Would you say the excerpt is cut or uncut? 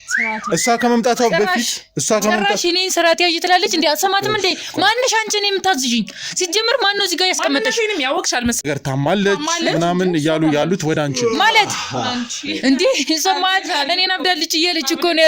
cut